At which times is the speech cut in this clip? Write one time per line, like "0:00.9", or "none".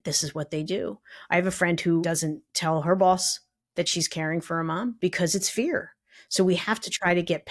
0:02.0
0:05.0